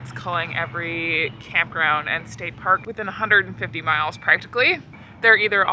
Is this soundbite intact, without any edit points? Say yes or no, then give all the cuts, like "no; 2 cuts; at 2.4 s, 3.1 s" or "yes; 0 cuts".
yes; 0 cuts